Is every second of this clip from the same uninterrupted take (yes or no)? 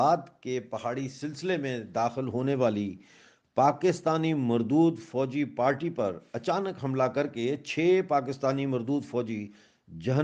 yes